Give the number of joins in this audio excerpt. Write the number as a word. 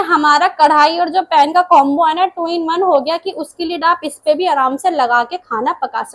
zero